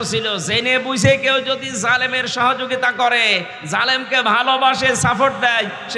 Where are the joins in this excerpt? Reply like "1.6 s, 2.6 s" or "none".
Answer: none